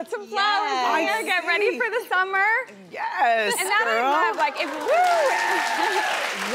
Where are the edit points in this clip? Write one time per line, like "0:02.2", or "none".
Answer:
0:04.3

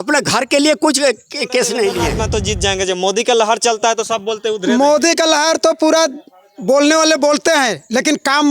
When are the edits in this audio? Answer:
0:02.2

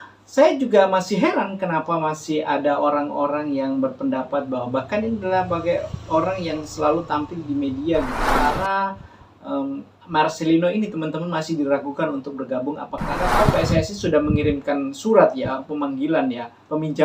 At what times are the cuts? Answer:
0:08.3
0:13.2

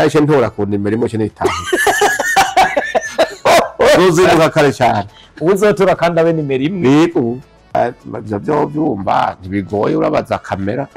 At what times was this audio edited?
0:07.6

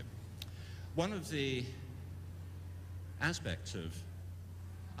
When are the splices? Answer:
0:03.3

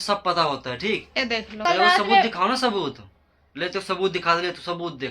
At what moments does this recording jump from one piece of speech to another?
0:01.5

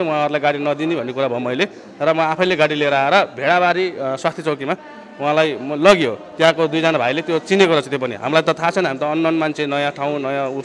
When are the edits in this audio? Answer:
none

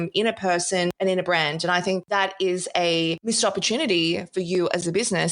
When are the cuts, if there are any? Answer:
0:00.9
0:02.0
0:03.2

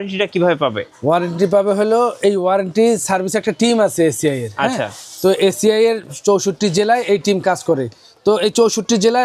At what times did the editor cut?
none

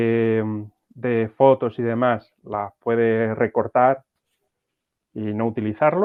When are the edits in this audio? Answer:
none

